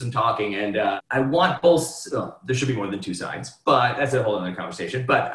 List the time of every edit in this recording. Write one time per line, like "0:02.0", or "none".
0:01.0